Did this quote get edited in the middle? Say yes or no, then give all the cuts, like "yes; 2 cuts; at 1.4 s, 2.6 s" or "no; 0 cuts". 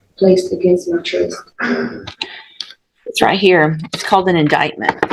no; 0 cuts